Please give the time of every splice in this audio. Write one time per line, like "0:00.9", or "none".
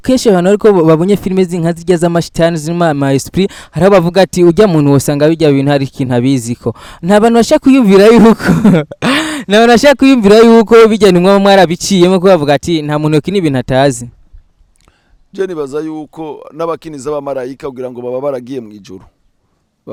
none